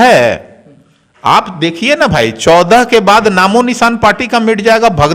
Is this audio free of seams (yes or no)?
yes